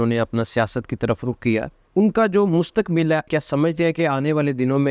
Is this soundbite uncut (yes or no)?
no